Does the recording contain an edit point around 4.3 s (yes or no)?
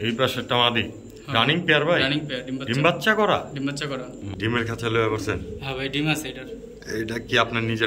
yes